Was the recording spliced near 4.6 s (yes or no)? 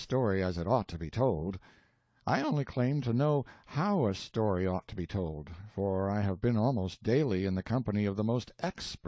yes